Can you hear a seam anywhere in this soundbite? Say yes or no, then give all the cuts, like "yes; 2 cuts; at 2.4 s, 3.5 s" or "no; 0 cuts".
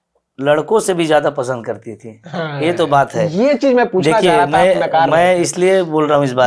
no; 0 cuts